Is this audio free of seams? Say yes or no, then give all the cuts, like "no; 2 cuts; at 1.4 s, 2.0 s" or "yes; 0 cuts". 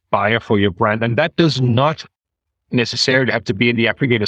yes; 0 cuts